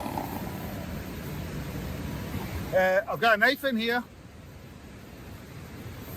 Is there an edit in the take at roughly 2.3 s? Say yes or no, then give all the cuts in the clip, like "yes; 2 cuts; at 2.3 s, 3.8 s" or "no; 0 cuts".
yes; 1 cut; at 2.3 s